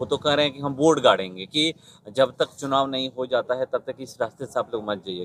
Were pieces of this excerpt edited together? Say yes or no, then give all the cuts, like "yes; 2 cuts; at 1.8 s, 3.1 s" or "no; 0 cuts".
no; 0 cuts